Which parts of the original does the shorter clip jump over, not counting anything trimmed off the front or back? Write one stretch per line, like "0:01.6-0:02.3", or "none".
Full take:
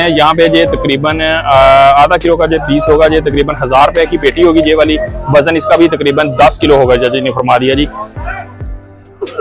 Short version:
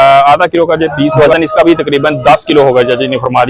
0:02.9-0:05.3